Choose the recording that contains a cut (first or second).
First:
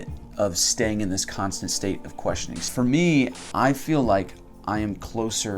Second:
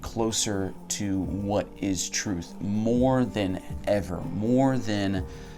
first